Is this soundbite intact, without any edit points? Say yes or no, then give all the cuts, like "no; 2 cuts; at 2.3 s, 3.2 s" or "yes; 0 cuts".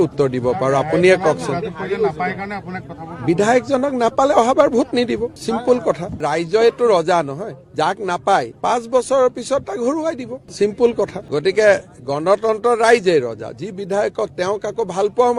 yes; 0 cuts